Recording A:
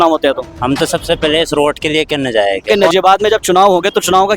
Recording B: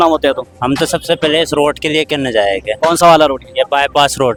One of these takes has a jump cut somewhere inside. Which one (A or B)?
A